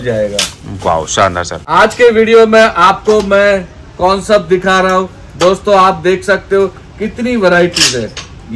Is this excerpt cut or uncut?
cut